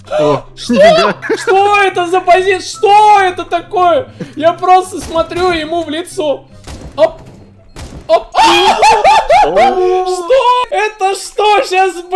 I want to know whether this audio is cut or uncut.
cut